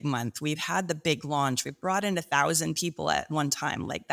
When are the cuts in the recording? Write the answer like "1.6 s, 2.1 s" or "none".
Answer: none